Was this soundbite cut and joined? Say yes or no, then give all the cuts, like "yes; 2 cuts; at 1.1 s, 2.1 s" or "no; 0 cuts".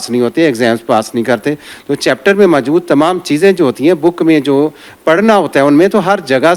yes; 1 cut; at 1.7 s